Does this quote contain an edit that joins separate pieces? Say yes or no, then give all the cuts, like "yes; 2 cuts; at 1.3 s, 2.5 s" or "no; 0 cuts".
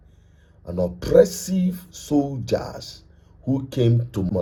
no; 0 cuts